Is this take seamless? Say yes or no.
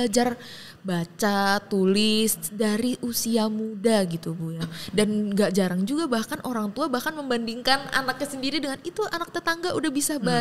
yes